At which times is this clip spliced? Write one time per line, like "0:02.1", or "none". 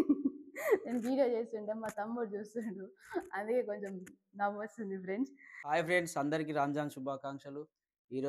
0:05.6